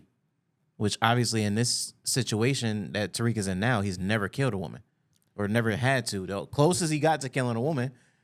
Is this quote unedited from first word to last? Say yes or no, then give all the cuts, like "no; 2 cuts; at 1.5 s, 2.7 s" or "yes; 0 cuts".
yes; 0 cuts